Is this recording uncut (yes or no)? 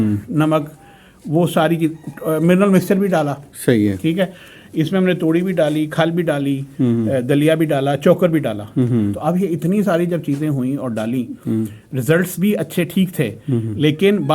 yes